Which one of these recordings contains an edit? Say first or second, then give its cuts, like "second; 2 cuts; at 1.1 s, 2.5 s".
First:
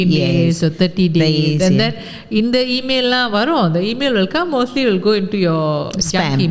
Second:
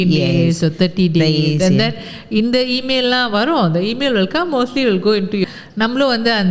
second; 1 cut; at 5.4 s